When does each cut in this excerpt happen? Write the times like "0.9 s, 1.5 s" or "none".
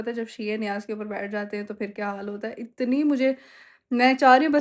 none